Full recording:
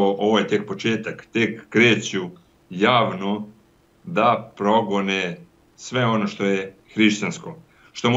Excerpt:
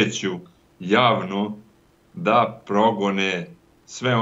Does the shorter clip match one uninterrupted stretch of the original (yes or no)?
yes